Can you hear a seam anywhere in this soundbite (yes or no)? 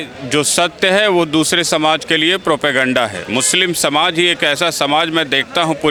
no